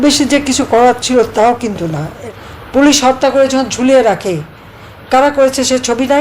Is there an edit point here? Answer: yes; 1 cut; at 2.1 s

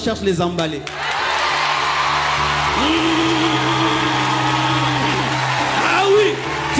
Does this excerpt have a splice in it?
no; 0 cuts

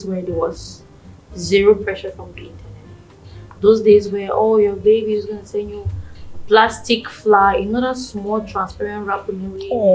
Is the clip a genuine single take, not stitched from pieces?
yes; 0 cuts

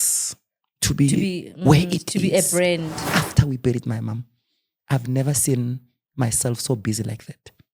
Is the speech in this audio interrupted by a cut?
yes; 1 cut; at 3.0 s

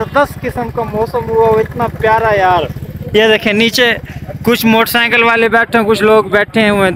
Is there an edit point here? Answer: no; 0 cuts

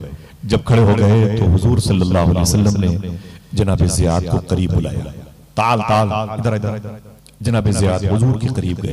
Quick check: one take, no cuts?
no; 1 cut; at 6.3 s

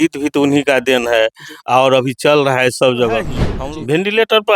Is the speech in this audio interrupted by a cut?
yes; 1 cut; at 3.4 s

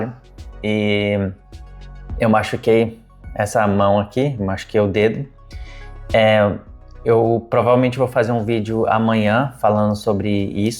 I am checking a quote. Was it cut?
no; 0 cuts

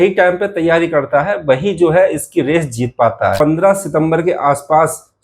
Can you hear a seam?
yes; 1 cut; at 3.3 s

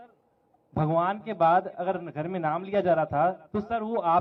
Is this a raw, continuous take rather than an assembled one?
yes; 0 cuts

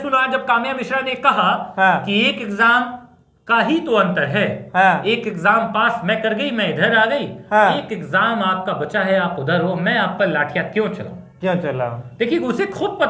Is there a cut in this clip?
no; 0 cuts

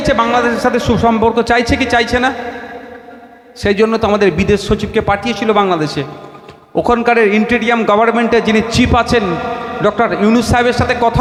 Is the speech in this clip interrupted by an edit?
no; 0 cuts

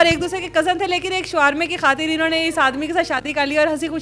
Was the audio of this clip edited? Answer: no; 0 cuts

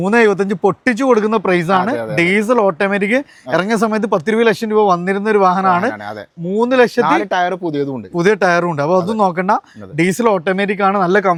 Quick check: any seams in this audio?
no; 0 cuts

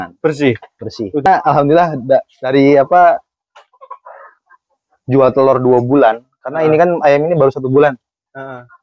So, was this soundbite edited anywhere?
yes; 1 cut; at 1.3 s

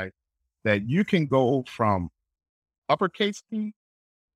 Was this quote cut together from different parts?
no; 0 cuts

